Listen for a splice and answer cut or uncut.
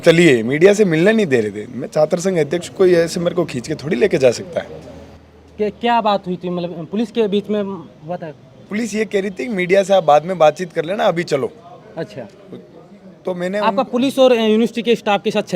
uncut